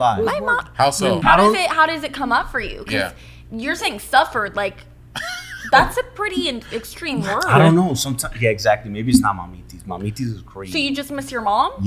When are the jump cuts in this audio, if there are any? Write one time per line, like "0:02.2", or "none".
0:01.2